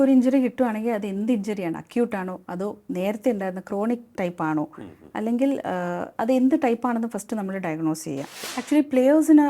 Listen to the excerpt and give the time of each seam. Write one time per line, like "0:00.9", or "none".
0:08.4